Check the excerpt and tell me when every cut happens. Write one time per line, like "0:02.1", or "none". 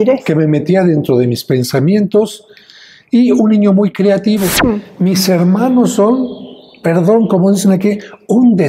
0:04.9